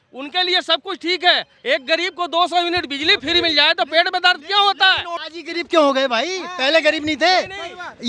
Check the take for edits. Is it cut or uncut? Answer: cut